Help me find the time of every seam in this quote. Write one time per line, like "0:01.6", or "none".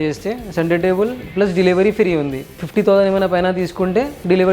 0:02.6